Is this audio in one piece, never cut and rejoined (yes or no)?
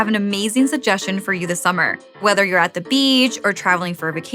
no